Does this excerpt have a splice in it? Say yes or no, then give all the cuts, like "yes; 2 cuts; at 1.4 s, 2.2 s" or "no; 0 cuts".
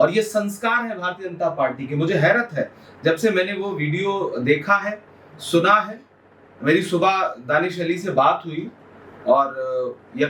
no; 0 cuts